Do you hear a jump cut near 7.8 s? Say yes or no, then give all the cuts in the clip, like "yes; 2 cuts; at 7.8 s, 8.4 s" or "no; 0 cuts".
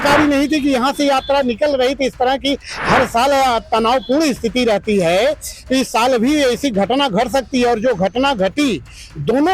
no; 0 cuts